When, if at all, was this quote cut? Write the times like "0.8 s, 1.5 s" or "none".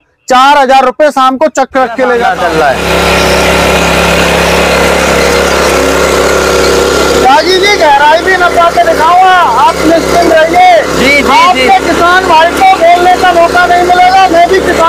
2.2 s